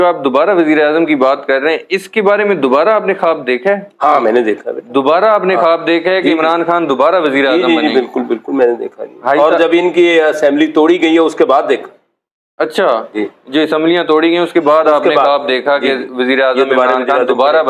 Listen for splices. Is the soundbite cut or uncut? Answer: uncut